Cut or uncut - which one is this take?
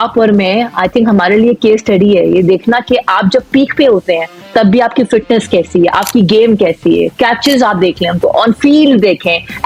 uncut